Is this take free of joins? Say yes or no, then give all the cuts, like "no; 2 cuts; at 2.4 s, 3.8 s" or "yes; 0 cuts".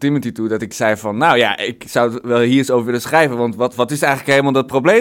yes; 0 cuts